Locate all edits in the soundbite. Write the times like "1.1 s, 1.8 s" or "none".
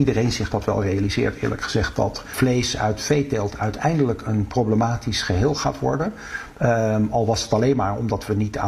2.3 s